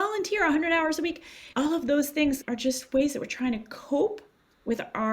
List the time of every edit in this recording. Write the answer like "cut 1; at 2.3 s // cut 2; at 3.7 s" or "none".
cut 1; at 2.4 s